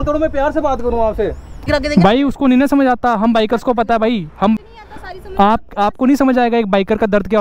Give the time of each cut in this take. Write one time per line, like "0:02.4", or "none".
0:01.7
0:04.6